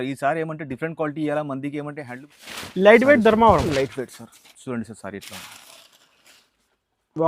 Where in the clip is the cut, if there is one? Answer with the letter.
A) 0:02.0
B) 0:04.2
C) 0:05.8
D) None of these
A